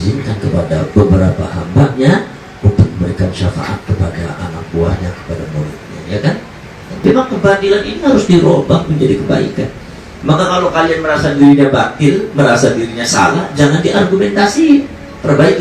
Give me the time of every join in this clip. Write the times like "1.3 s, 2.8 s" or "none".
7.0 s